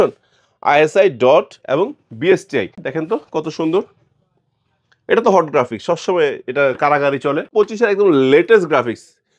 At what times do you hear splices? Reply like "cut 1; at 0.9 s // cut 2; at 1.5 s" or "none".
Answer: cut 1; at 2.9 s // cut 2; at 7.5 s

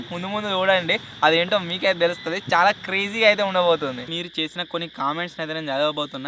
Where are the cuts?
cut 1; at 4.1 s

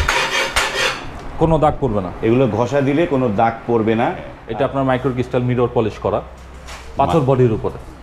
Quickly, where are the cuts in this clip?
cut 1; at 4.3 s

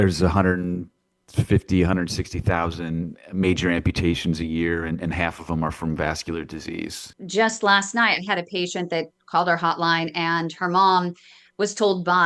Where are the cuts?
cut 1; at 7.1 s

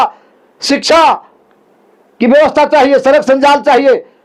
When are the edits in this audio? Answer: none

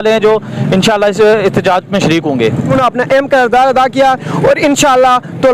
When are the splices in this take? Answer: cut 1; at 2.7 s

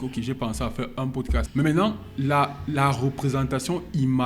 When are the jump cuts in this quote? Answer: cut 1; at 1.5 s

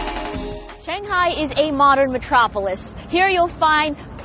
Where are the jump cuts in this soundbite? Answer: none

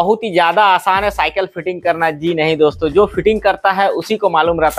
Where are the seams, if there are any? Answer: none

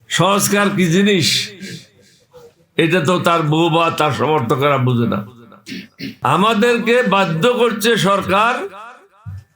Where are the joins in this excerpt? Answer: cut 1; at 6.0 s

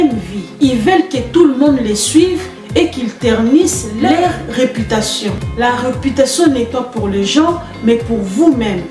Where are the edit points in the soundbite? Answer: cut 1; at 5.4 s

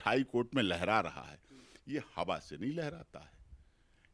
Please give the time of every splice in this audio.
none

